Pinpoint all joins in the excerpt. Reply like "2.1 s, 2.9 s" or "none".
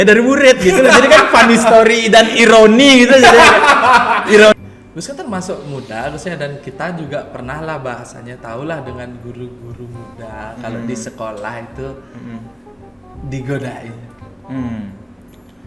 4.5 s